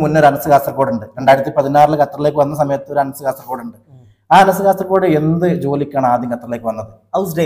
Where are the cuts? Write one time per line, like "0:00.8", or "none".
none